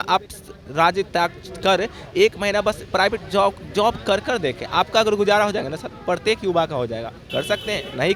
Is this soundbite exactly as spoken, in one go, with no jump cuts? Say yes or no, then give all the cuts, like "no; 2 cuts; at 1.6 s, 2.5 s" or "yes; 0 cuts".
yes; 0 cuts